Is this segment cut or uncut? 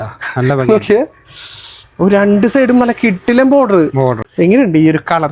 cut